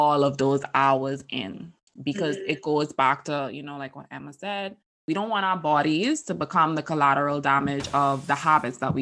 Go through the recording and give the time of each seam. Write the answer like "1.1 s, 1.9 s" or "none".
5.0 s